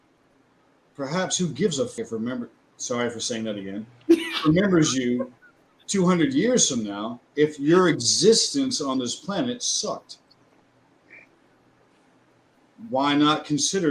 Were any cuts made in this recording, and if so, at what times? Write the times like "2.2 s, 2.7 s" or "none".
1.9 s